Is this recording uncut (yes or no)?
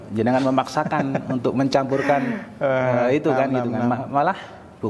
yes